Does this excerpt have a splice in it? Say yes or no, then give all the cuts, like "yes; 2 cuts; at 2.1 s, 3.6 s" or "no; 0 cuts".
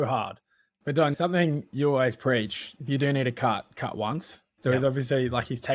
yes; 2 cuts; at 1.1 s, 4.4 s